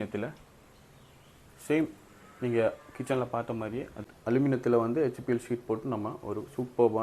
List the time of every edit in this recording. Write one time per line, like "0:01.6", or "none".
0:04.0

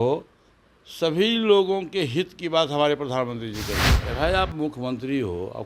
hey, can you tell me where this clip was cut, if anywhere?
0:03.9

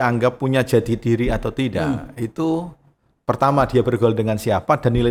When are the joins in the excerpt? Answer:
none

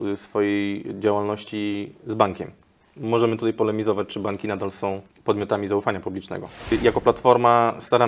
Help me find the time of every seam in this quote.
0:05.1
0:06.7

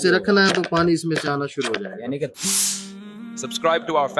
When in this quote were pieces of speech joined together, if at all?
0:02.3

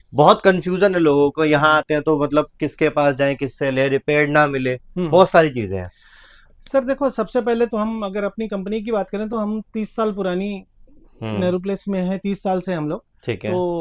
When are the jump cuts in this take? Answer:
none

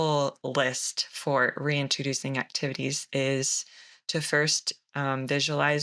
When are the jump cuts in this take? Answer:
0:03.0

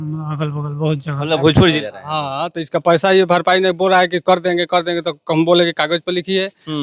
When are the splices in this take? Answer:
0:01.9

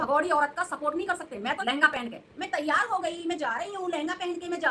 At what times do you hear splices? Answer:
0:01.6

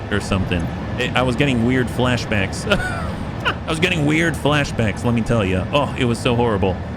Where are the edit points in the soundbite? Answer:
0:03.6

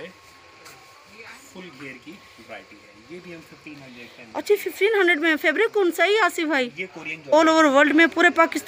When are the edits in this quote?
0:07.2

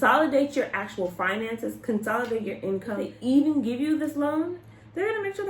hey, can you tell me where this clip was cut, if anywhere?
0:03.1

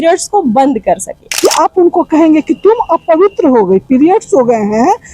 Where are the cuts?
0:01.2

